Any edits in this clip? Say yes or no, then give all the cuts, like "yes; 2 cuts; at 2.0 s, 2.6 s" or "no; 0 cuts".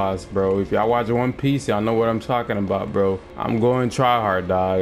yes; 1 cut; at 3.3 s